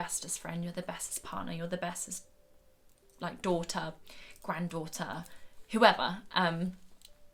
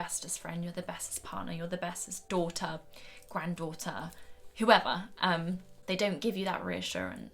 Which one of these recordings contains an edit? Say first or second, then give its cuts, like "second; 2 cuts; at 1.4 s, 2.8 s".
second; 2 cuts; at 2.2 s, 5.7 s